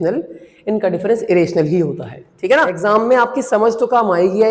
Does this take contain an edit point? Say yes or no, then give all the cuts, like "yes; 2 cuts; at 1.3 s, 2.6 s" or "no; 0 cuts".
yes; 1 cut; at 2.8 s